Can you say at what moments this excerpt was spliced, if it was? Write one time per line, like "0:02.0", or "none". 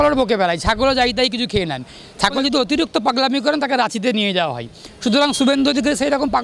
0:02.4